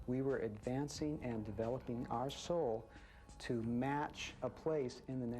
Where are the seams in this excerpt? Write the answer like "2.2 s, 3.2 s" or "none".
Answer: 4.2 s